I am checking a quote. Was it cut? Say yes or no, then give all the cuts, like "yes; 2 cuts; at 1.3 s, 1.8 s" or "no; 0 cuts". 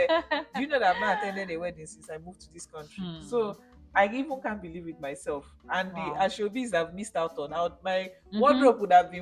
no; 0 cuts